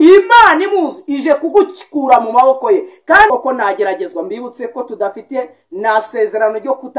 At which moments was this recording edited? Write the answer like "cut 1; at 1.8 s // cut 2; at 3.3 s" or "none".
cut 1; at 3.3 s